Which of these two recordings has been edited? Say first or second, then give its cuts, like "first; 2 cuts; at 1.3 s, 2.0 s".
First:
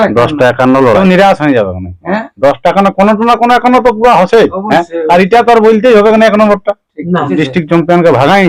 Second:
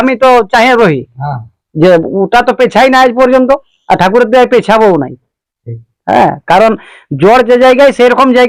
first; 2 cuts; at 1.0 s, 7.3 s